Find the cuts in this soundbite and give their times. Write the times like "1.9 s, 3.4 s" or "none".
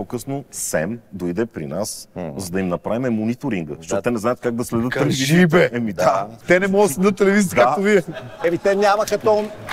6.3 s